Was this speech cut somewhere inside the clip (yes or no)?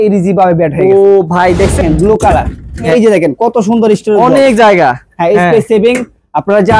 yes